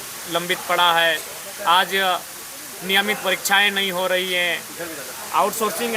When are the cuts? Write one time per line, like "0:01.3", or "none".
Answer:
none

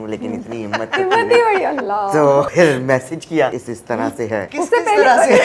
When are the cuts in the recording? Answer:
0:02.5
0:04.0

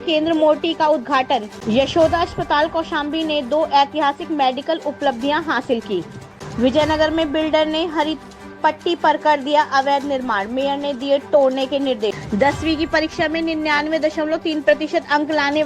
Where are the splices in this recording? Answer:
0:01.5
0:06.5
0:12.2

